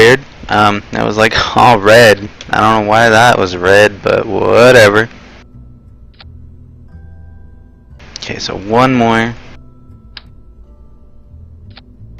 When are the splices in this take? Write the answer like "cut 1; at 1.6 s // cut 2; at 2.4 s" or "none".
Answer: cut 1; at 9.5 s